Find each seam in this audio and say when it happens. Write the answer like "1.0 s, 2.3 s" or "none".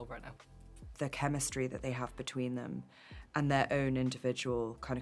0.9 s